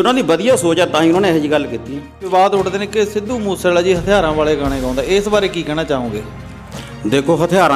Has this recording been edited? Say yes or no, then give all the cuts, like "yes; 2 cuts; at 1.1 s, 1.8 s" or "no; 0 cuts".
yes; 1 cut; at 2.2 s